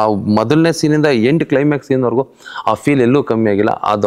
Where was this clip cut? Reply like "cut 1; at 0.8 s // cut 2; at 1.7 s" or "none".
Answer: none